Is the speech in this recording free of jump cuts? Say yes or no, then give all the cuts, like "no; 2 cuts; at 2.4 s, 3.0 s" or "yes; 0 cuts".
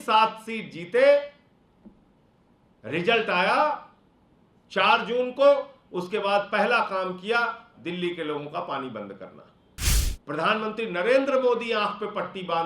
no; 1 cut; at 10.1 s